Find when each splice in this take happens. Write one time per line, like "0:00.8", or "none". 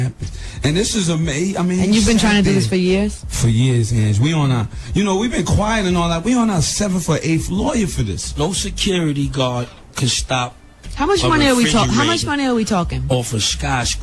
0:12.8